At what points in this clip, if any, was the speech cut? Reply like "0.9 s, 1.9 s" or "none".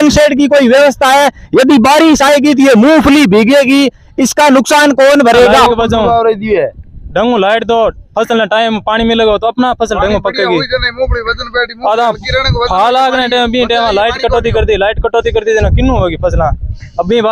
5.7 s

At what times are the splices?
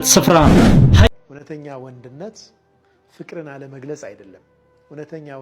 1.1 s

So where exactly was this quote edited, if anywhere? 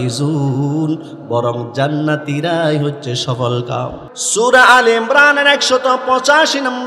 4.1 s

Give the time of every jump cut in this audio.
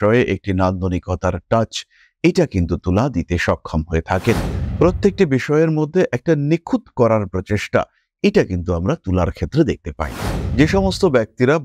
10.4 s

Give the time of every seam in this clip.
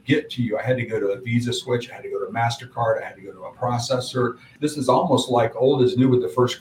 4.5 s

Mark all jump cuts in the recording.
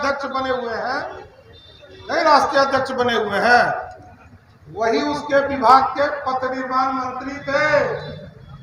none

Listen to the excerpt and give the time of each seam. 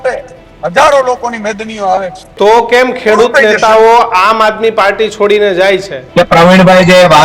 2.3 s, 6.0 s

